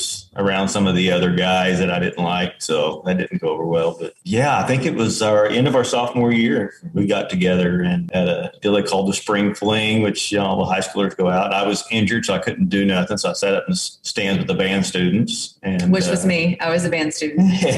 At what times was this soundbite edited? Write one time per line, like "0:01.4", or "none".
none